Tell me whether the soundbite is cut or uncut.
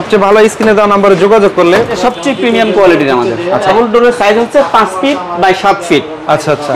cut